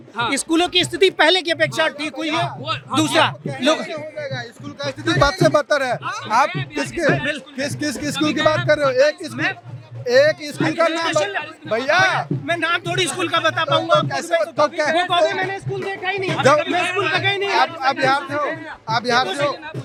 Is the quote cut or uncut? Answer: uncut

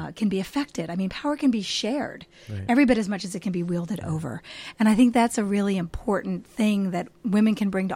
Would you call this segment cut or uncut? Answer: uncut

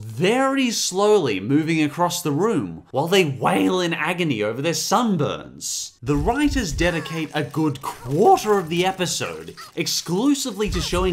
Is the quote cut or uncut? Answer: cut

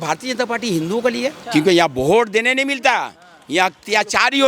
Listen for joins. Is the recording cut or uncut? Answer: cut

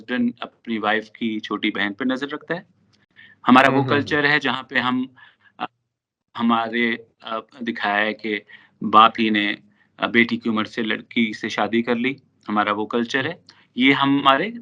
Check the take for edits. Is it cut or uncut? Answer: uncut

